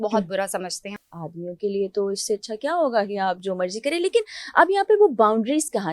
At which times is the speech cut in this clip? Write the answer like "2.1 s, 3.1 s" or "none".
1.0 s